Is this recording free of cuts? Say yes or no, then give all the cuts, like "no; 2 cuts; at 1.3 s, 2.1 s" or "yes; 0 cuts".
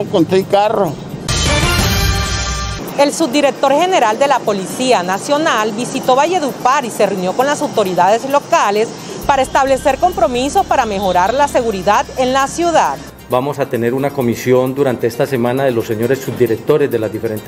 no; 3 cuts; at 1.3 s, 2.7 s, 13.1 s